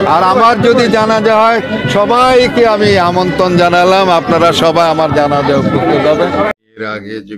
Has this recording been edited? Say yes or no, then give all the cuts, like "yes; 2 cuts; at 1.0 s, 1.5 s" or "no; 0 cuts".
no; 0 cuts